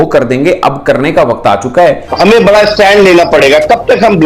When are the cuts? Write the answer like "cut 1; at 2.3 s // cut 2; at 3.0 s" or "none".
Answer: cut 1; at 2.1 s